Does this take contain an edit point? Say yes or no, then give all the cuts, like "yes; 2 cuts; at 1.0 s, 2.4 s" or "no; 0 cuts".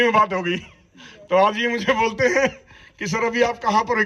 no; 0 cuts